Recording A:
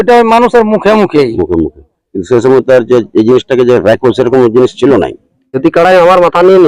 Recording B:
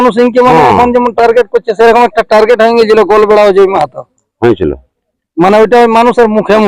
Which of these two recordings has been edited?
A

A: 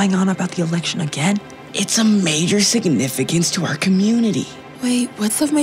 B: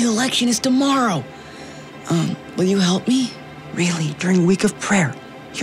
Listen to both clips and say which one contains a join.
A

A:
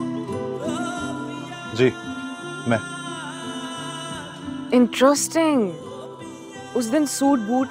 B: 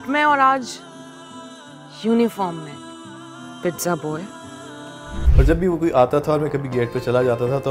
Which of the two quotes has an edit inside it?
B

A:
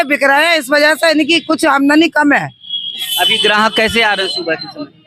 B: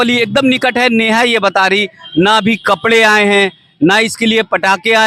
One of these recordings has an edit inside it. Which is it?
A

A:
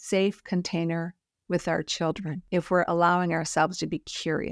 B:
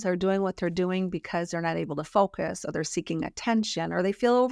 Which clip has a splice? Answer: A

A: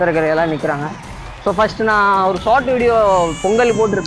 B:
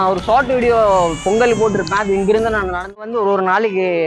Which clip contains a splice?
B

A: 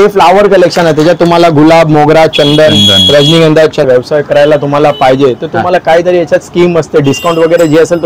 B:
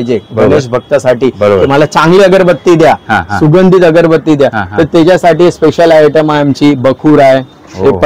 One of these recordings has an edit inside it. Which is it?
A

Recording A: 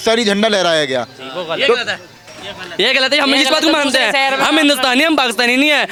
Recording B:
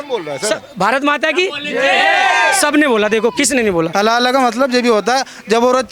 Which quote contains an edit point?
B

